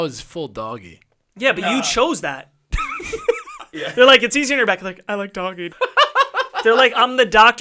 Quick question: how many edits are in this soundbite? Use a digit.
1